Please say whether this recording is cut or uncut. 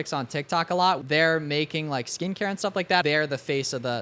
cut